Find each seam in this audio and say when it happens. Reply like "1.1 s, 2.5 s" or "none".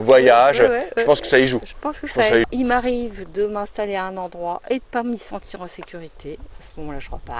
2.5 s